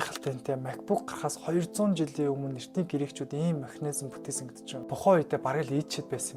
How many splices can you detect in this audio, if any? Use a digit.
1